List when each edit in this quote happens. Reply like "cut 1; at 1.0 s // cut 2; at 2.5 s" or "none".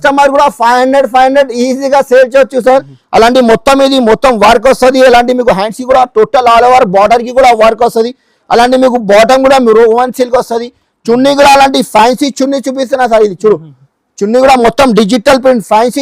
cut 1; at 3.0 s